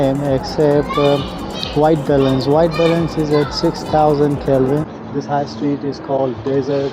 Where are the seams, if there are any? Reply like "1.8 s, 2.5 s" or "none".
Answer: 4.9 s

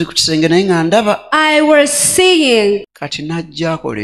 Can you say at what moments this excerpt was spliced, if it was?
2.9 s

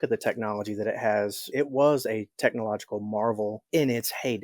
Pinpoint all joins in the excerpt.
1.4 s

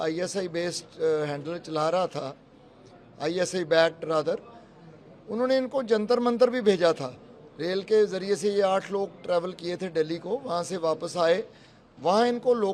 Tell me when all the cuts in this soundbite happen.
none

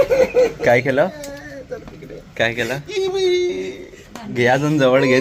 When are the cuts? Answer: none

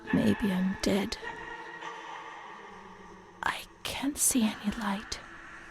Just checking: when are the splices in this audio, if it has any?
1.2 s, 3.3 s

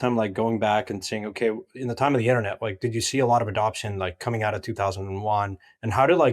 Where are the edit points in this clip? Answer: none

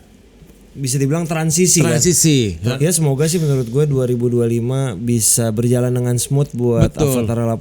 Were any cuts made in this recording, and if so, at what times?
2.7 s

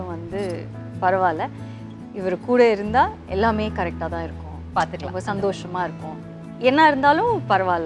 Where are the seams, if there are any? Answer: none

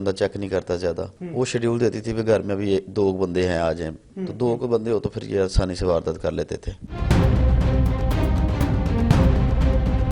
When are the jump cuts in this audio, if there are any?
1.2 s

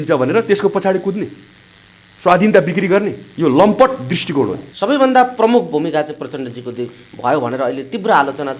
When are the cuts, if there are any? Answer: 4.7 s

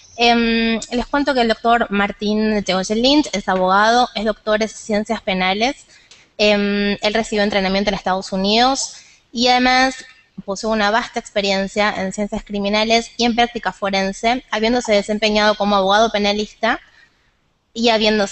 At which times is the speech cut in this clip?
none

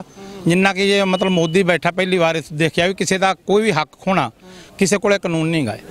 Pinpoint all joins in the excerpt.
none

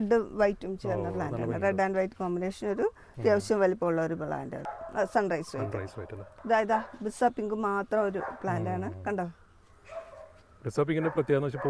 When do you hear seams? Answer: 4.7 s, 6.3 s

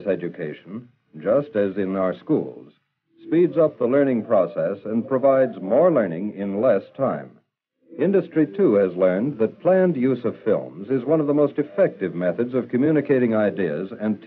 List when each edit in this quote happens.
4.0 s

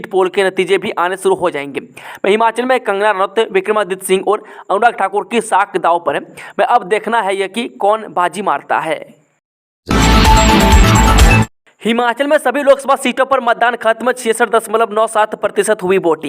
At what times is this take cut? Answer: 9.6 s, 11.5 s

